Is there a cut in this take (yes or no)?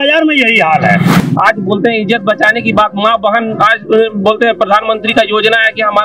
yes